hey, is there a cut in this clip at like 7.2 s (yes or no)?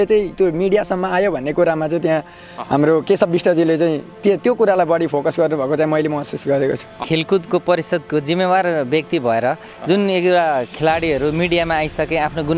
yes